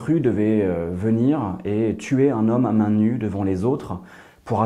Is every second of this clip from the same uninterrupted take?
yes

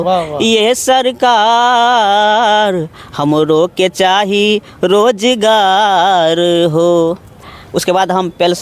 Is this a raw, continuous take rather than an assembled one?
yes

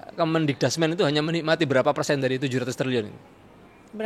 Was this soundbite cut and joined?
no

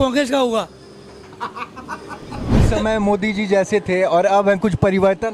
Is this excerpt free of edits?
no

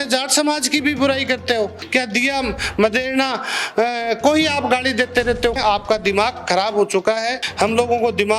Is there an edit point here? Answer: yes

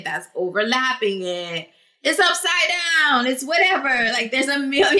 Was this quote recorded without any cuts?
yes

